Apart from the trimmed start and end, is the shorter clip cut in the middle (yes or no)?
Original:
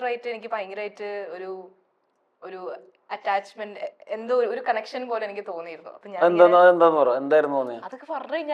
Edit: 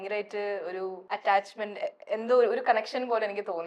yes